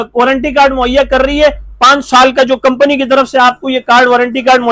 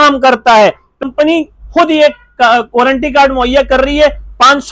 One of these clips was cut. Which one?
second; 1 cut; at 1.0 s

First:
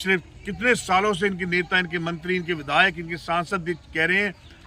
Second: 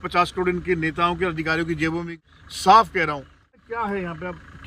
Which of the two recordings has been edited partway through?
second; 2 cuts; at 2.1 s, 3.5 s

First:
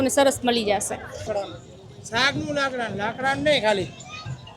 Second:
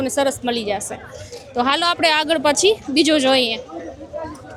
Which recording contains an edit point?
first; 1 cut; at 1.3 s

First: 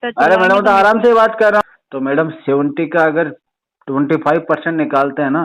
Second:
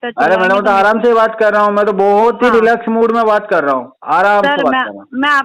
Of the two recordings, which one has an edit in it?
first; 1 cut; at 1.6 s

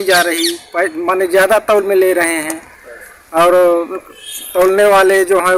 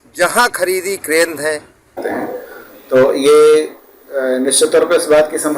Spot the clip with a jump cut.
second; 1 cut; at 2.0 s

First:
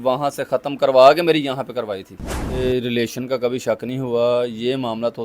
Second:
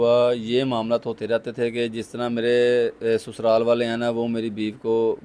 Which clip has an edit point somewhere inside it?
first; 1 cut; at 2.6 s

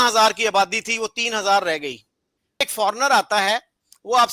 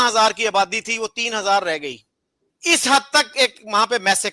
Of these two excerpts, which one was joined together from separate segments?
first; 1 cut; at 2.6 s

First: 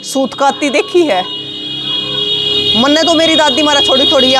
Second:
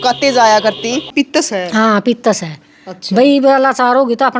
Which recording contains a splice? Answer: second; 1 cut; at 1.1 s

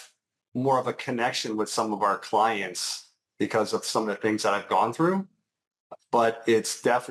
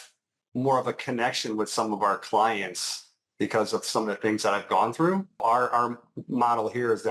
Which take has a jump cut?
second; 1 cut; at 5.4 s

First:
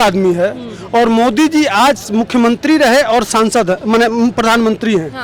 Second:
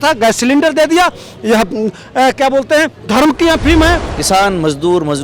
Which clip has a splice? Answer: second; 1 cut; at 4.1 s

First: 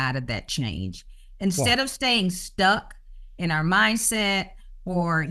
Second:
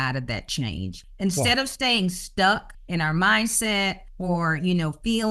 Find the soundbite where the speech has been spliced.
second; 3 cuts; at 1.0 s, 2.7 s, 4.1 s

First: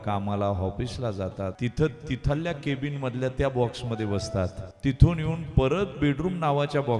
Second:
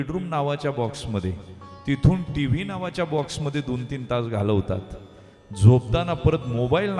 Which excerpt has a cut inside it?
first; 2 cuts; at 1.5 s, 4.6 s

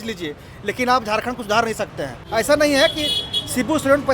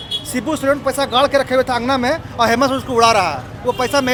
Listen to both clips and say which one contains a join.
first; 1 cut; at 2.2 s

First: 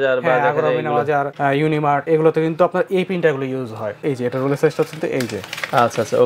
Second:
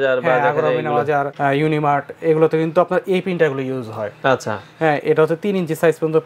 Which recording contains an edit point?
first; 2 cuts; at 2.0 s, 4.0 s

